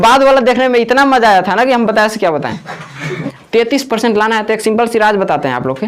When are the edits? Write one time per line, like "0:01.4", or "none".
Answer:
0:03.3